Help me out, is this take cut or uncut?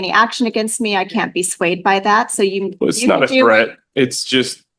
uncut